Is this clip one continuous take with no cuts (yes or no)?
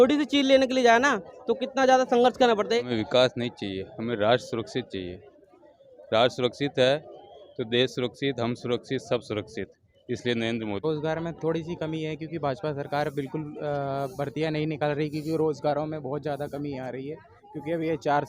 no